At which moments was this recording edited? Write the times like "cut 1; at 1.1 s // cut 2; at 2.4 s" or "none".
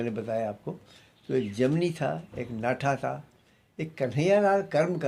none